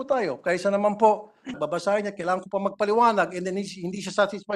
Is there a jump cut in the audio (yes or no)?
yes